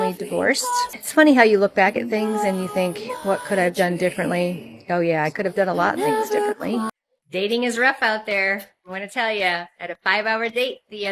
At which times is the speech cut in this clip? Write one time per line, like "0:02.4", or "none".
0:01.0
0:06.9